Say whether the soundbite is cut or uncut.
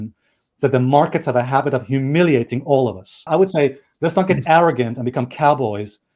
uncut